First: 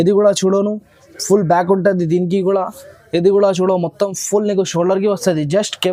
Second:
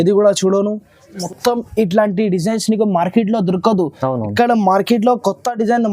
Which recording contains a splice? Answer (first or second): second